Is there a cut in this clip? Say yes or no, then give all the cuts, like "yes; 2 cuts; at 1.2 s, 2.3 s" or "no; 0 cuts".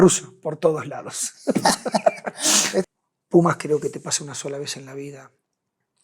yes; 1 cut; at 2.9 s